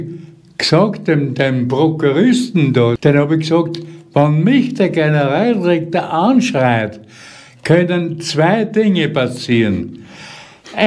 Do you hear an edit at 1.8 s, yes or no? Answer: no